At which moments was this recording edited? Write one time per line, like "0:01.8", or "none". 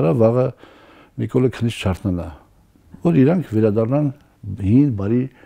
none